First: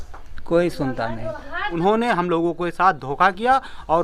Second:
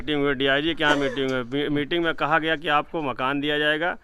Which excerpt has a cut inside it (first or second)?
first